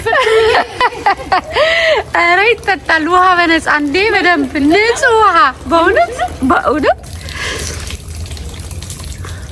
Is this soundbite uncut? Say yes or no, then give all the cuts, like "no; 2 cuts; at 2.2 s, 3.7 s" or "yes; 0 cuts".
yes; 0 cuts